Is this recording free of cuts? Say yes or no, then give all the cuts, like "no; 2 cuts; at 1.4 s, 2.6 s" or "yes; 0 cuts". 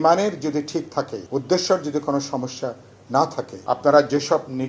no; 2 cuts; at 1.2 s, 3.5 s